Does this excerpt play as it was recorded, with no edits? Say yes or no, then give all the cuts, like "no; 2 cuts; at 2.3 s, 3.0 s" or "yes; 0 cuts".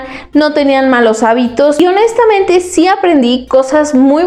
yes; 0 cuts